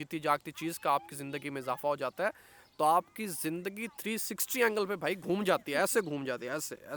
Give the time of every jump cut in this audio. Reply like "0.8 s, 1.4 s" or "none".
none